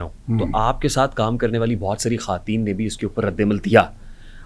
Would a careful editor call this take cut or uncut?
uncut